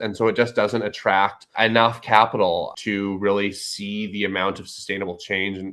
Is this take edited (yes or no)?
yes